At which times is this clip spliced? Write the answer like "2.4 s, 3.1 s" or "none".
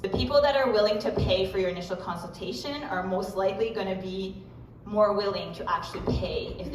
none